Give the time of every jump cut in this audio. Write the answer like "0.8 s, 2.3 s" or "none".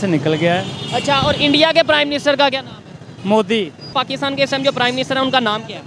3.9 s